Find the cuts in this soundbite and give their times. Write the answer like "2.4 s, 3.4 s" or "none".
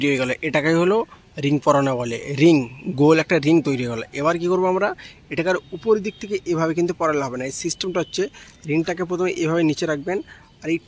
none